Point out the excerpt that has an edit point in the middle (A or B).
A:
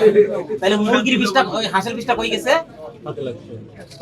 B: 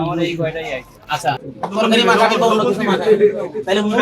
B